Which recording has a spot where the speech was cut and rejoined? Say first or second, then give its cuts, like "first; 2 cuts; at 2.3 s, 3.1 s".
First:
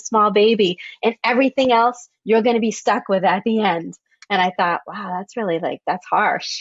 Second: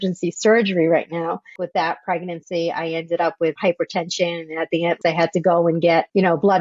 second; 3 cuts; at 1.4 s, 3.6 s, 5.0 s